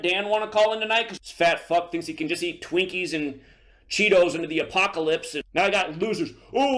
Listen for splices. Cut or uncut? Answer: cut